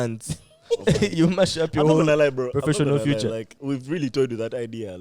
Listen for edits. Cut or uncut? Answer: cut